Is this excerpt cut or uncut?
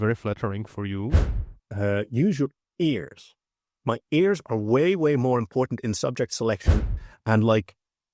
cut